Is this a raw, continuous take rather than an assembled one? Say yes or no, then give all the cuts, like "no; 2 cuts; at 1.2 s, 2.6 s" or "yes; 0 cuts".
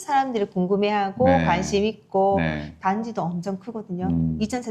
yes; 0 cuts